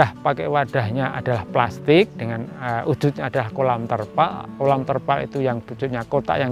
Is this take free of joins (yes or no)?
yes